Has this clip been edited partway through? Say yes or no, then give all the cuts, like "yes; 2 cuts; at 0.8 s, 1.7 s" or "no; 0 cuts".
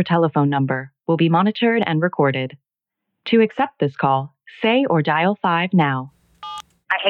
no; 0 cuts